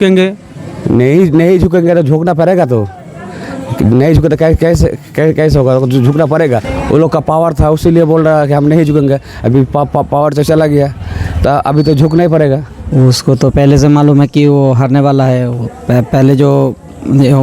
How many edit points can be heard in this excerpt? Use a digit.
1